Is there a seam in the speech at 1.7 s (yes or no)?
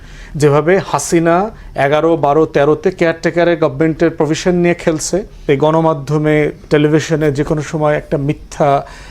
no